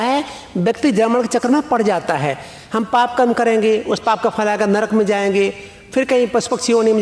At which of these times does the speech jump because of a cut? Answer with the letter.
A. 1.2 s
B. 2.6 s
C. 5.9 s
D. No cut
D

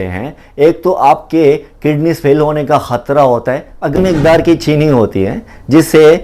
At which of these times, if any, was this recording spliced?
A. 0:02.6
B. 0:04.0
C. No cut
B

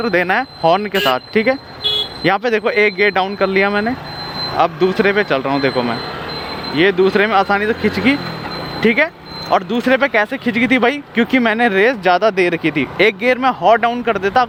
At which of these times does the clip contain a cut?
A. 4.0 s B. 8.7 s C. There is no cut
C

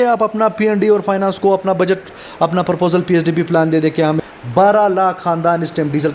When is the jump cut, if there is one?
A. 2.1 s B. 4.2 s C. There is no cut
B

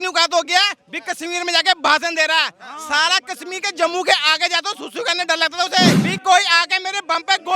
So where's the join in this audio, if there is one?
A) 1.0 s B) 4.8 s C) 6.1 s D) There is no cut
C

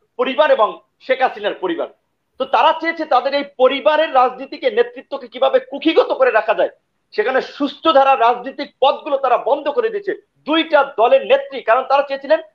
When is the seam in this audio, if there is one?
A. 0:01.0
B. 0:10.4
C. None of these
C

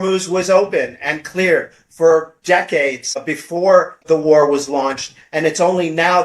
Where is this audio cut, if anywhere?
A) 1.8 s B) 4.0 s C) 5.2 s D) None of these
B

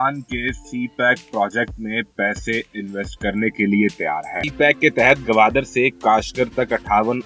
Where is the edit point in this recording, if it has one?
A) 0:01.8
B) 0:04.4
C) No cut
B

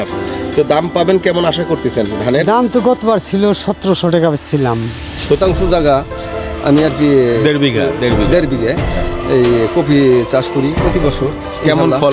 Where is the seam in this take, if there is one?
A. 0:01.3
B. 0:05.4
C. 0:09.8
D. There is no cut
B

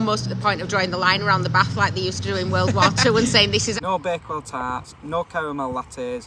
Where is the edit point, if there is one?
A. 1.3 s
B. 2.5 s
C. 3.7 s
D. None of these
C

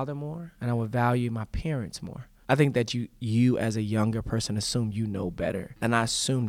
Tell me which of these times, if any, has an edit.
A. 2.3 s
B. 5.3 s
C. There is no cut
A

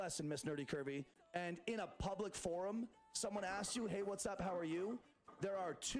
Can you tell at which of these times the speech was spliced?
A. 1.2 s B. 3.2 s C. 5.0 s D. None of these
A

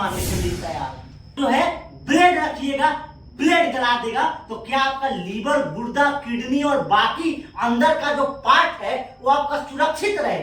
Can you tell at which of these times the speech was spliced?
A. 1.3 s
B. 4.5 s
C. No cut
A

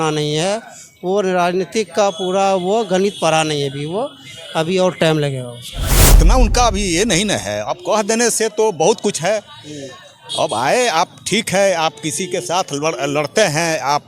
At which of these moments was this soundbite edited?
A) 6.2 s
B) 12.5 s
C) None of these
A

